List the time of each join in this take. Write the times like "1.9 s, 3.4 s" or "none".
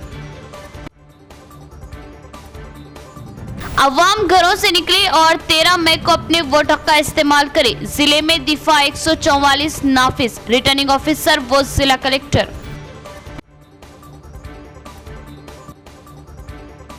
none